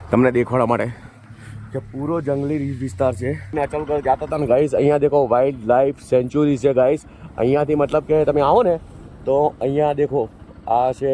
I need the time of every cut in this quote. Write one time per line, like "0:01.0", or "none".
0:03.4